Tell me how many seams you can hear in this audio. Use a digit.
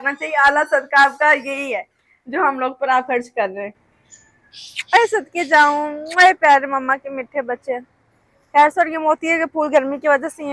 1